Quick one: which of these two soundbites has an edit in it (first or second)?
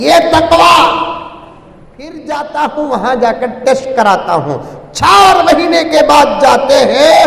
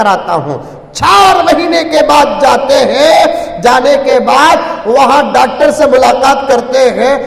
first